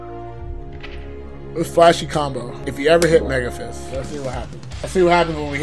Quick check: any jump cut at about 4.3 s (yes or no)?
no